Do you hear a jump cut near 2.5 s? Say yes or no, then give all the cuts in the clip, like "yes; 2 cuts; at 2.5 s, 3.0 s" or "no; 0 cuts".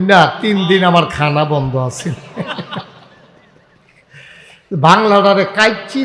no; 0 cuts